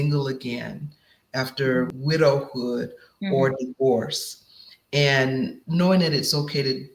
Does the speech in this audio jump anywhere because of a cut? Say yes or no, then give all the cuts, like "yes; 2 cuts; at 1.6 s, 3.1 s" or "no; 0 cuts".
yes; 2 cuts; at 1.9 s, 5.6 s